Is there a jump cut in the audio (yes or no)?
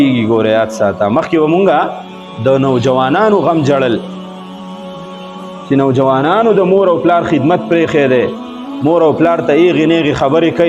no